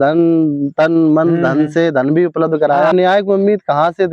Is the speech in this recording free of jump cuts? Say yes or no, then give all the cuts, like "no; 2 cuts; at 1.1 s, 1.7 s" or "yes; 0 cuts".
no; 1 cut; at 2.9 s